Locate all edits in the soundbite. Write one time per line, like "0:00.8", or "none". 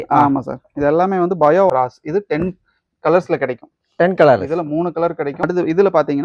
0:01.7
0:05.4

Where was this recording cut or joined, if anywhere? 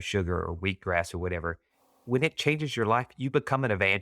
0:02.0

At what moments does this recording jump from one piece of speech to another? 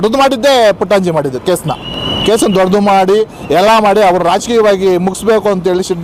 none

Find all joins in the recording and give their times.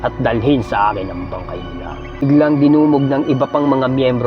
0:02.2

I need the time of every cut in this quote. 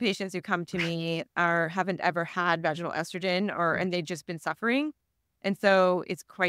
none

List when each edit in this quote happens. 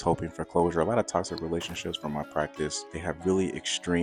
0:02.9

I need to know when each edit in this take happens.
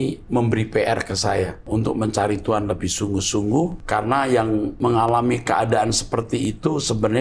0:01.6
0:03.8
0:04.7

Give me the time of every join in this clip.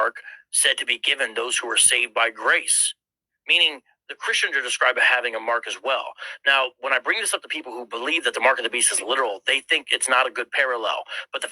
none

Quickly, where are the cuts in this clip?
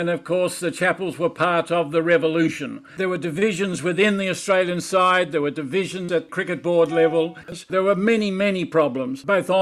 0:02.9
0:07.5

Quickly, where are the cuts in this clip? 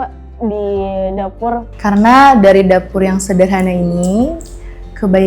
0:01.7

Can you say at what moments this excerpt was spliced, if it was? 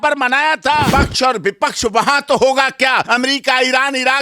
0:00.9
0:03.0

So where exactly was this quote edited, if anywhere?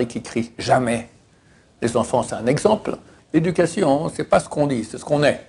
0:03.1

